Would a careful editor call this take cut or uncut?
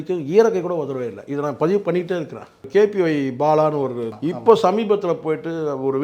cut